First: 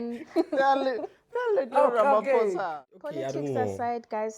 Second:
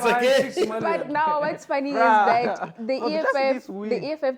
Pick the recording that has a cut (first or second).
first